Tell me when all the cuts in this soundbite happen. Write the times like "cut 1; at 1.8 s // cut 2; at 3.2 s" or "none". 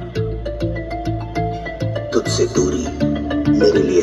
none